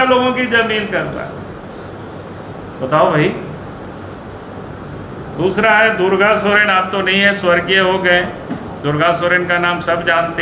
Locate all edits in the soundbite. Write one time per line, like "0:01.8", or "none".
none